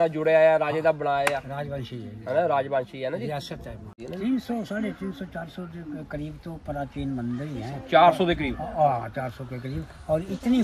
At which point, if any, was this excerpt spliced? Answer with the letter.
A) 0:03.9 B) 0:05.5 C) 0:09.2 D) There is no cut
A